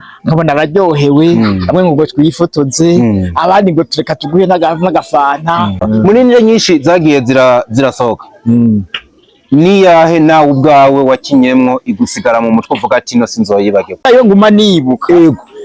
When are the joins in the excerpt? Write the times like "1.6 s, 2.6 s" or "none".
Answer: 5.8 s, 14.0 s